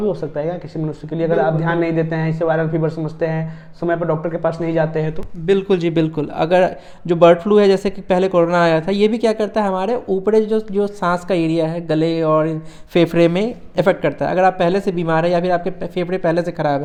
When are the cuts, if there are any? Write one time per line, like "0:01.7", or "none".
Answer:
none